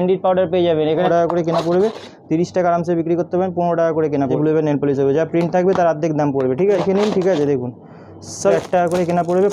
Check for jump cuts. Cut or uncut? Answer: cut